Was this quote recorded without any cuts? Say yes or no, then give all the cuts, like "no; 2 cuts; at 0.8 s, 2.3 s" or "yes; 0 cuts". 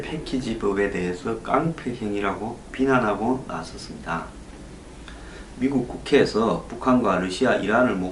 yes; 0 cuts